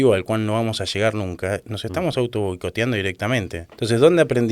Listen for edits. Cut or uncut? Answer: cut